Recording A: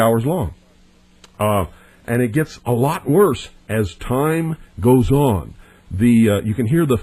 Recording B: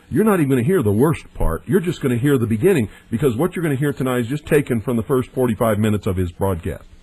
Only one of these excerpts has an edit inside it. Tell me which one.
B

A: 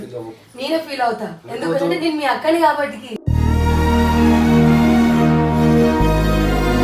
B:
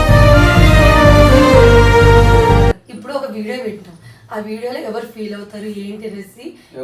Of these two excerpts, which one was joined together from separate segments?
B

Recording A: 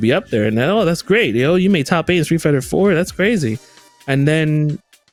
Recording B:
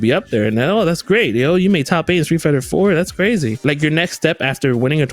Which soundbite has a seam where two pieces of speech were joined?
B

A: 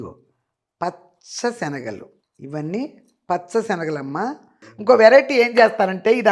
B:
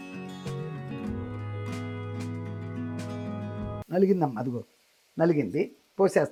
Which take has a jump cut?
A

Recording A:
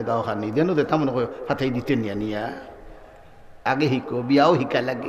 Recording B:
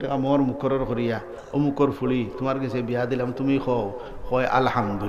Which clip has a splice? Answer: A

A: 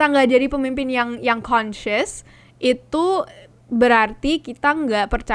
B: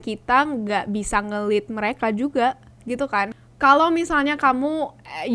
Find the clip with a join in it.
B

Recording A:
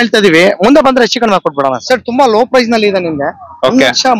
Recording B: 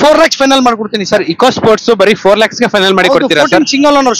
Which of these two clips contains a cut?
A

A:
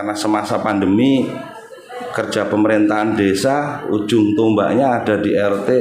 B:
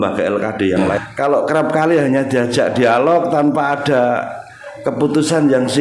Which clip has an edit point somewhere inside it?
B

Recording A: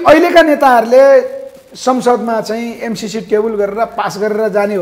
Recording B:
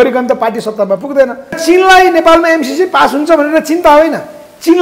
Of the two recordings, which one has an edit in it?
B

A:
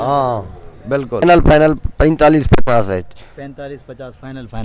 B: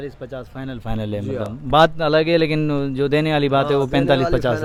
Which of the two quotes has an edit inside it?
A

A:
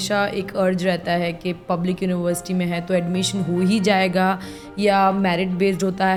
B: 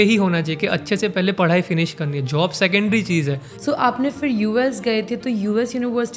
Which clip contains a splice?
B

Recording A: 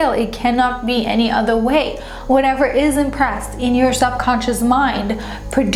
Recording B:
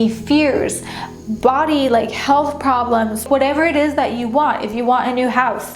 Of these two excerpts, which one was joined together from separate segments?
B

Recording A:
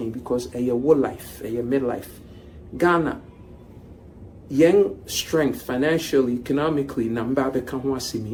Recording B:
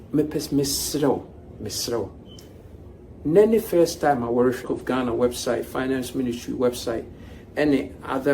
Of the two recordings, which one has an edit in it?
B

